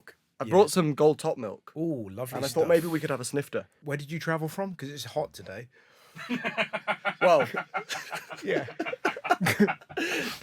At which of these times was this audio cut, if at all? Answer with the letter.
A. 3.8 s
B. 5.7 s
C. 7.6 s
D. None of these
A